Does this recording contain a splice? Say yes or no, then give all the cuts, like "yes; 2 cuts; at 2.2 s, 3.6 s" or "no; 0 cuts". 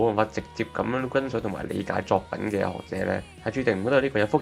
no; 0 cuts